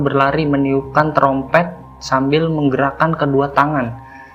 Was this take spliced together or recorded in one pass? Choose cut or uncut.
uncut